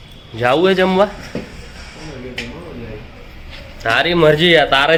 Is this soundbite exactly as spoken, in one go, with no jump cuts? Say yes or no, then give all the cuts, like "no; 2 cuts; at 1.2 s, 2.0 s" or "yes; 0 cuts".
yes; 0 cuts